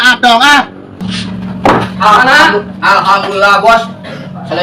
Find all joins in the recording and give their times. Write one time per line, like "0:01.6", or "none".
0:01.0